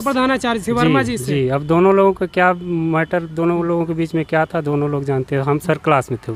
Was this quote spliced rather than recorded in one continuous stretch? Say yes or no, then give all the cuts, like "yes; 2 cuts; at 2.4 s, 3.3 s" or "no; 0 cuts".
no; 0 cuts